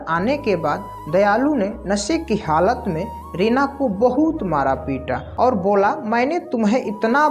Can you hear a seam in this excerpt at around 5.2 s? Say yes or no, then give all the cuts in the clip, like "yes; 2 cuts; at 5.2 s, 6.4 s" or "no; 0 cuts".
yes; 1 cut; at 5.2 s